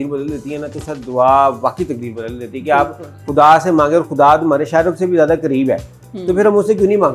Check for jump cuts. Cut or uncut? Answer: uncut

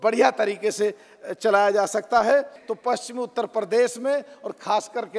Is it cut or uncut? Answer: cut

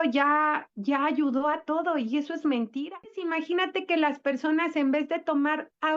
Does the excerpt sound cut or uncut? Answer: cut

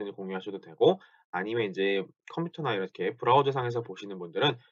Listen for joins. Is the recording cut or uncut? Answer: cut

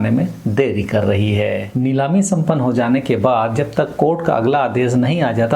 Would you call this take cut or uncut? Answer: cut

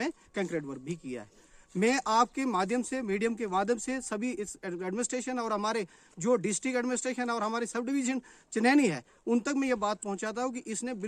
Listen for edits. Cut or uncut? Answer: uncut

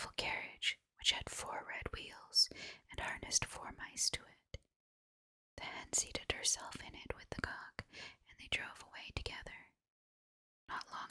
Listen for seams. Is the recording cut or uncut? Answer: uncut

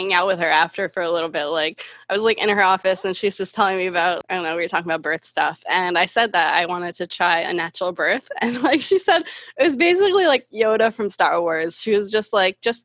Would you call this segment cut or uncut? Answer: cut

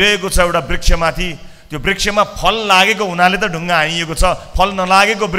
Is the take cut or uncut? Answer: uncut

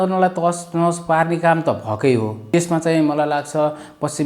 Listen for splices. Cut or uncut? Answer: cut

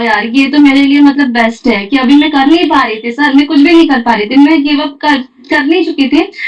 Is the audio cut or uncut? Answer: uncut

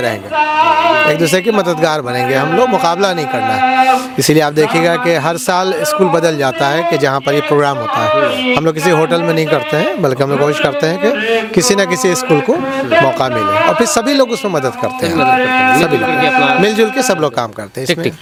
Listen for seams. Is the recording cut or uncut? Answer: uncut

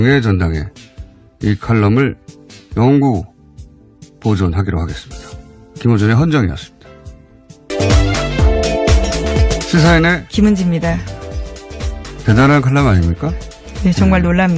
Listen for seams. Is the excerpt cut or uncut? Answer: uncut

